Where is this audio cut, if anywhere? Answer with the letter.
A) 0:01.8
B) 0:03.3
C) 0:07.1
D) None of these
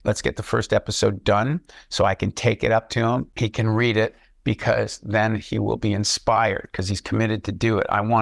B